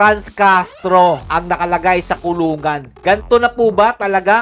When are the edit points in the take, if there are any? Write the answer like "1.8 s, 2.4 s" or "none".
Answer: 1.2 s, 2.9 s